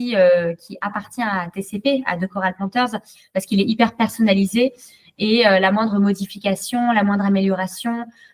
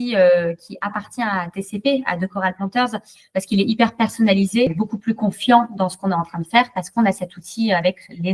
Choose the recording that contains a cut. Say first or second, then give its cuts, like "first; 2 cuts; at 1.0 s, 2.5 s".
second; 1 cut; at 4.7 s